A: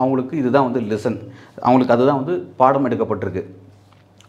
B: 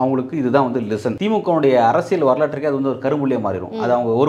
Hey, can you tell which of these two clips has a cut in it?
B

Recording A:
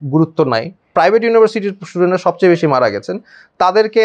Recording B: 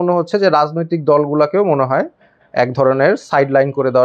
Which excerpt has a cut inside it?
A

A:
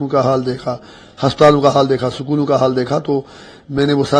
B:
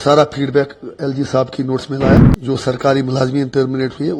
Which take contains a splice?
B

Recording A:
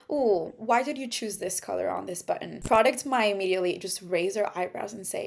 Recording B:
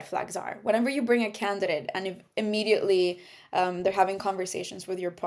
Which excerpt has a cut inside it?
A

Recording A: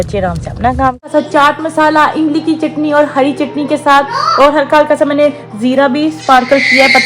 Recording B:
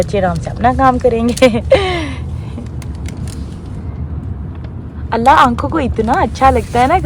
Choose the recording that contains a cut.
A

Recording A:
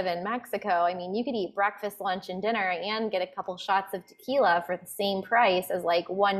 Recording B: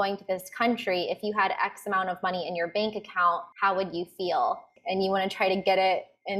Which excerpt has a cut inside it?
B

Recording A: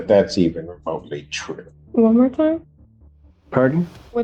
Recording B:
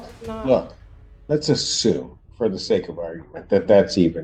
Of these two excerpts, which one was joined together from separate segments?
A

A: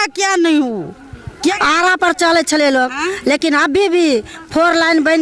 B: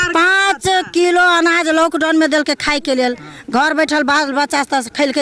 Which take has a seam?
A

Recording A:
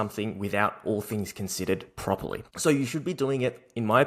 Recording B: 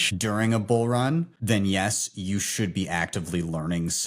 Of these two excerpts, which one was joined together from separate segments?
B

